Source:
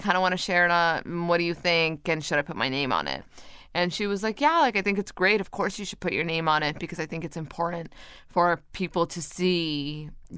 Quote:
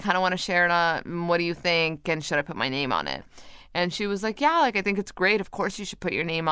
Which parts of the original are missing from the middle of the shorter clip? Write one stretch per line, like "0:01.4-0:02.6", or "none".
none